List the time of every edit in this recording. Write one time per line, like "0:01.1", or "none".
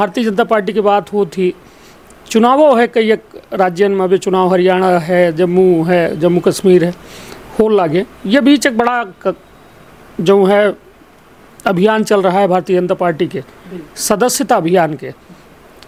none